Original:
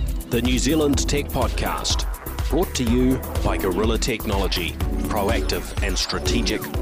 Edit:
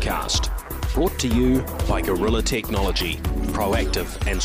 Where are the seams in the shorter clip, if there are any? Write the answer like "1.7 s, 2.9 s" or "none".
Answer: none